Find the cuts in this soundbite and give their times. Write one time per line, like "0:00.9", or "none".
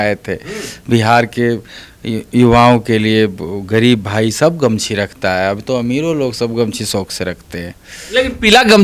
none